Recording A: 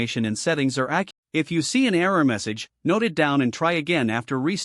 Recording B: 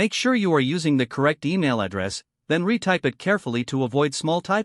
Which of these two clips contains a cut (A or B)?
A